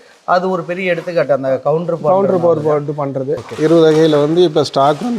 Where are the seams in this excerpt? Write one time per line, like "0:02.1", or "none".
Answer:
0:03.4